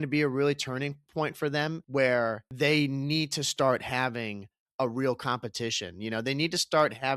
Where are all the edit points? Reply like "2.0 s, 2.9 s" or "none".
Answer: 1.8 s, 2.4 s